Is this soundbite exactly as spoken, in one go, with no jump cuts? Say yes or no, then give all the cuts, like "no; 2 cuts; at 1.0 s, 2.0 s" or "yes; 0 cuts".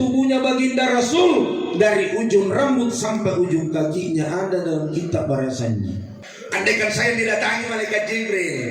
no; 1 cut; at 6.2 s